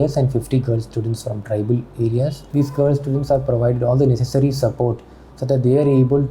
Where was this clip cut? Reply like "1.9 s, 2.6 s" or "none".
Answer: 2.4 s

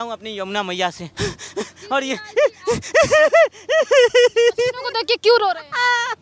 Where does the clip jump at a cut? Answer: 1.1 s

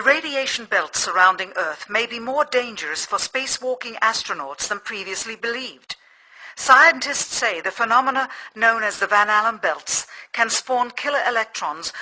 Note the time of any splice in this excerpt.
none

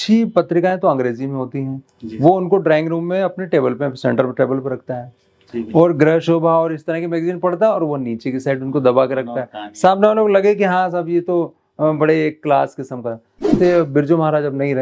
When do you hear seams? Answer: 13.6 s

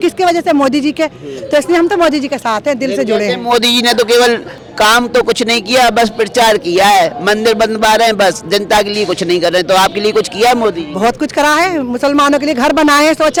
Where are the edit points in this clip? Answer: none

